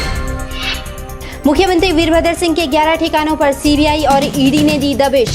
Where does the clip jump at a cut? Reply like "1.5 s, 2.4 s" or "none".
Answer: 0.9 s